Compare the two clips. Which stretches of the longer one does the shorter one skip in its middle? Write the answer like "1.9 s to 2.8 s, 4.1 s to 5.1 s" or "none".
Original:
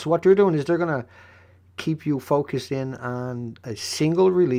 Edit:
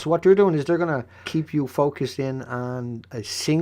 1.2 s to 1.7 s